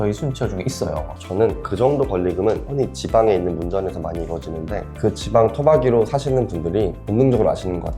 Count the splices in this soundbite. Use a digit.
0